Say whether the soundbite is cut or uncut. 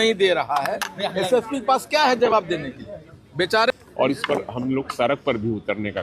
cut